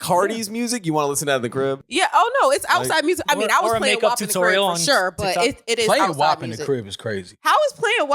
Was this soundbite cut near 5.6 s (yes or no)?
no